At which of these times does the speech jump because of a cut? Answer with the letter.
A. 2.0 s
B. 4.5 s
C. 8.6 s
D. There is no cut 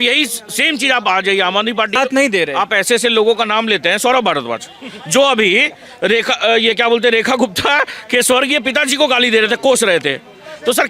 A